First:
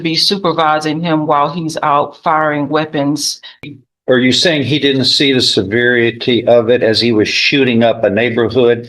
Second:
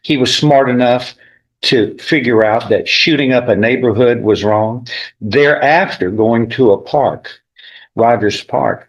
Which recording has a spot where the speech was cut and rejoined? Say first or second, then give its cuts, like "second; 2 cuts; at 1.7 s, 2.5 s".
first; 1 cut; at 3.7 s